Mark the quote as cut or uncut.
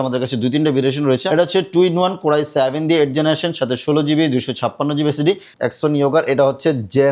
cut